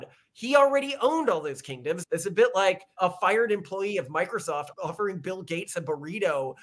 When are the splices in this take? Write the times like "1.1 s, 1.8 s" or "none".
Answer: 2.0 s, 2.9 s, 4.7 s